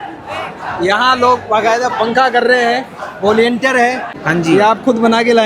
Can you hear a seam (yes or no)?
yes